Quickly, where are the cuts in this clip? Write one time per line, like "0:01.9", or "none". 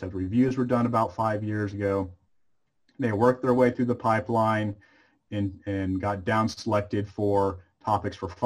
none